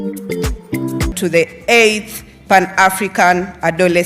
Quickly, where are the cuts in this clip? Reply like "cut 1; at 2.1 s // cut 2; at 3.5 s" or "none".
cut 1; at 1.1 s